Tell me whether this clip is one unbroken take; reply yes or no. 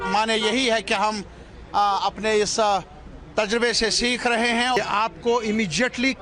no